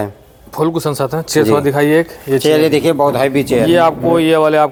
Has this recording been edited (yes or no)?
no